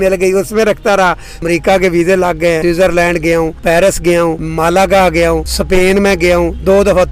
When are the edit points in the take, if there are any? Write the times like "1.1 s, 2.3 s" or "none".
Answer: 1.3 s, 2.6 s, 3.6 s, 4.4 s, 5.5 s